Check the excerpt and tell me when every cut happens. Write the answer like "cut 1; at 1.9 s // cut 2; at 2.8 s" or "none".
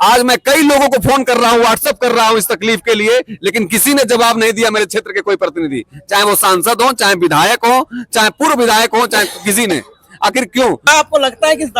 cut 1; at 10.9 s